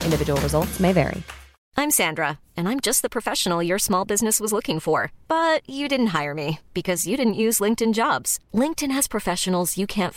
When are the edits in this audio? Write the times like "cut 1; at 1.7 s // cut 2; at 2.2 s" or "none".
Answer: cut 1; at 1.6 s